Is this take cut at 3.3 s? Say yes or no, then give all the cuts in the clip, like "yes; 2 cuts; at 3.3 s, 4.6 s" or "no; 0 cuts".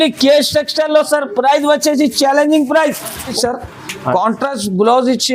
yes; 1 cut; at 3.3 s